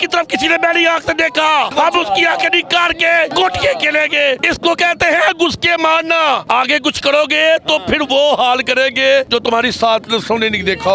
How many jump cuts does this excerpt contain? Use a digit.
5